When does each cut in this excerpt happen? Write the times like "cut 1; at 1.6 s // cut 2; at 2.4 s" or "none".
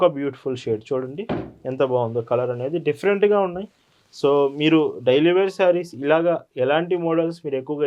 none